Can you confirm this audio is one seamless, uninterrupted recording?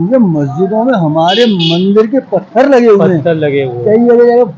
yes; 0 cuts

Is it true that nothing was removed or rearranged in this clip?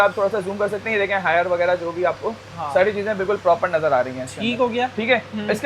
yes; 0 cuts

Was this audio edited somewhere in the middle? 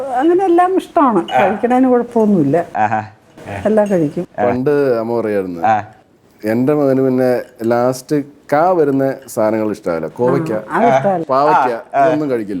no; 0 cuts

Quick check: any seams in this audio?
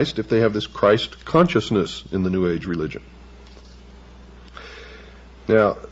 yes; 1 cut; at 1.7 s

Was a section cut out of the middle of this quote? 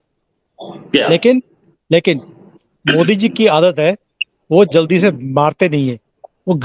no; 0 cuts

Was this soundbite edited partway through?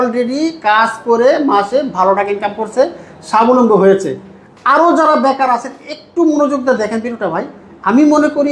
no; 0 cuts

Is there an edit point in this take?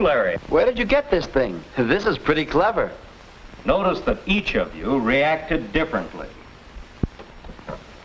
no; 0 cuts

